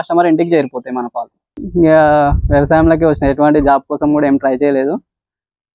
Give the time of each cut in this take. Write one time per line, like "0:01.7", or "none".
0:01.6